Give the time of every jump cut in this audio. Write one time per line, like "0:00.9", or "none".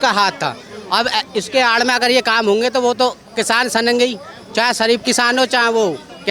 none